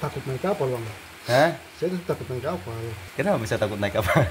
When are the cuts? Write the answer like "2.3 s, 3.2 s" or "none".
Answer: 3.0 s